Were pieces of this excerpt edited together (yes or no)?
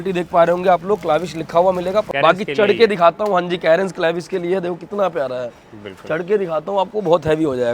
yes